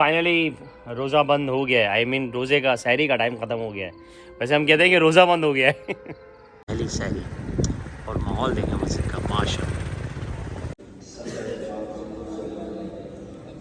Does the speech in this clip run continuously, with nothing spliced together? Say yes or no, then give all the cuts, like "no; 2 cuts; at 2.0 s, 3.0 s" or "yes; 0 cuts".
no; 2 cuts; at 6.7 s, 10.8 s